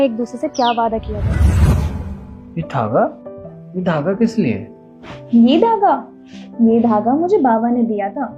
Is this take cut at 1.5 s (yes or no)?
yes